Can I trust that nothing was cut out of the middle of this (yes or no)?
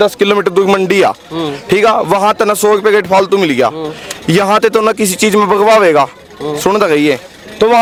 yes